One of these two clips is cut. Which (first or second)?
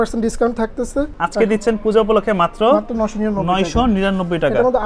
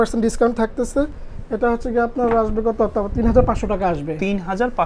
first